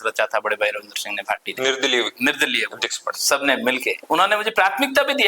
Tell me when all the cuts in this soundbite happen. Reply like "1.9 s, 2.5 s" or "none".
4.0 s